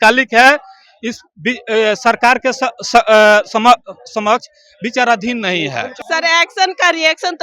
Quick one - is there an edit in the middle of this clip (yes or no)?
yes